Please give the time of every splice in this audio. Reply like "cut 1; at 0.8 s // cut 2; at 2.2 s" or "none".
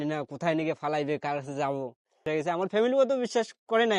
cut 1; at 2.2 s